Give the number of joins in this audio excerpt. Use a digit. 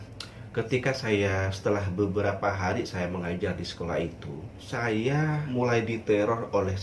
2